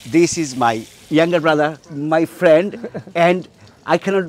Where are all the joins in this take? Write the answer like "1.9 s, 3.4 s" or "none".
0.9 s, 1.8 s